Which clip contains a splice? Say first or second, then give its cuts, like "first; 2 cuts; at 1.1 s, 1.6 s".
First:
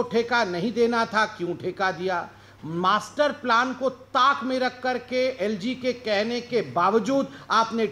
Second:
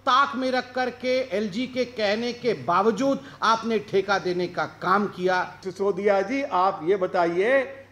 second; 1 cut; at 5.6 s